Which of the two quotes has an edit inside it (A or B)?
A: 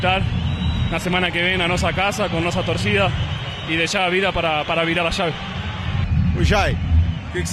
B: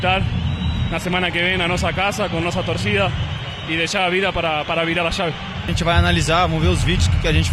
B